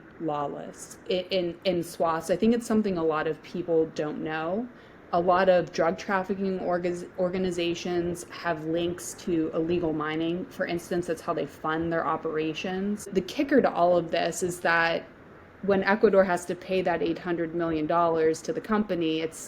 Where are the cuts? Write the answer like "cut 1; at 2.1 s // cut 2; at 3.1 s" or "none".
cut 1; at 13.1 s